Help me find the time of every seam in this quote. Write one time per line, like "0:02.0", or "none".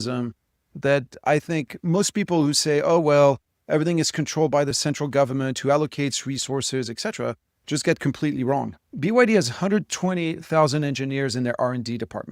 0:08.8